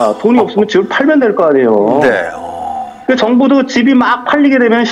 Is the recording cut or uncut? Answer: cut